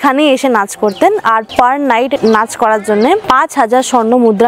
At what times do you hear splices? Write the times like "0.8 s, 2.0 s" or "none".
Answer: none